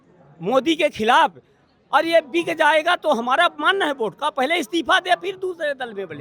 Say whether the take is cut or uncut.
uncut